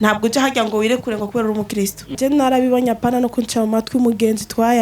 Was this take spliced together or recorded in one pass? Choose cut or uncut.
cut